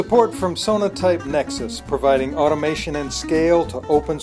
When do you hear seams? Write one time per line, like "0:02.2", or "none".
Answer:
none